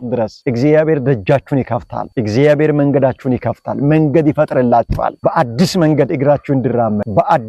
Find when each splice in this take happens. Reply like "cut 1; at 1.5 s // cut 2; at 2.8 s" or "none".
none